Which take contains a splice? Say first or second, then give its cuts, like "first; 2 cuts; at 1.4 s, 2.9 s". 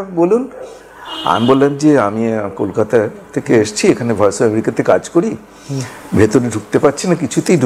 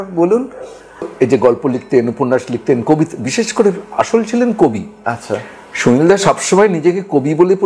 second; 1 cut; at 1.1 s